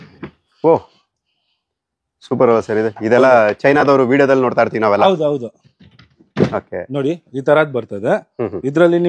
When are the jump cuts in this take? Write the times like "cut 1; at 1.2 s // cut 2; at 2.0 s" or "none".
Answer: none